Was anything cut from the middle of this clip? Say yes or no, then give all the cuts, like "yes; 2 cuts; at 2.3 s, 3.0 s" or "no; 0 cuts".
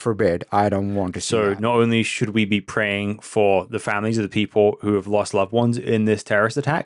yes; 1 cut; at 1.2 s